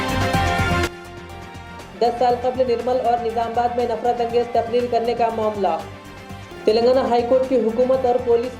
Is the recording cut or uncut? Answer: cut